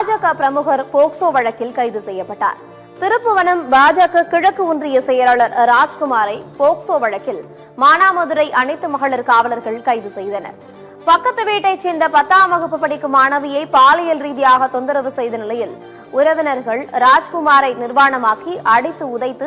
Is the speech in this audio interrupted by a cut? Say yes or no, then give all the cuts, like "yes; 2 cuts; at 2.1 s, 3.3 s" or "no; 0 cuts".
no; 0 cuts